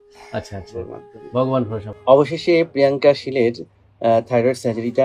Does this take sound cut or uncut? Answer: cut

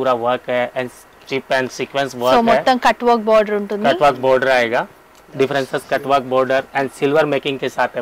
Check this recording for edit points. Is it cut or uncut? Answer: uncut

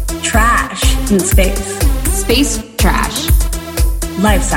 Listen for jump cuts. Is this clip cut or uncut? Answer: uncut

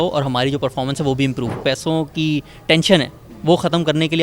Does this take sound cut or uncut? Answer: cut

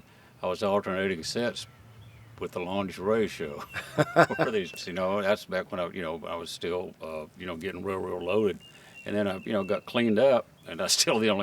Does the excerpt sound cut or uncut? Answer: cut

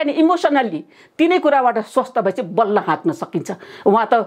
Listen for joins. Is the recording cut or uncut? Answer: uncut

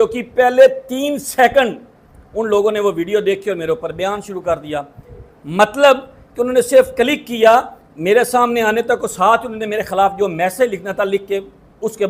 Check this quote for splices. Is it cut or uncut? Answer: uncut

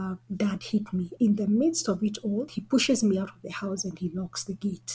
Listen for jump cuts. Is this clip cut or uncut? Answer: cut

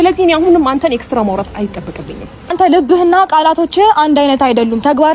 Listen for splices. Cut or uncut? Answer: cut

